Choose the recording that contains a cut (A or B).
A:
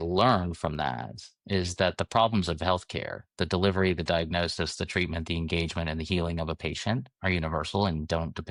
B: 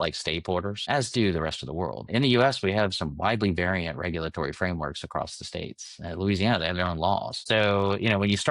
B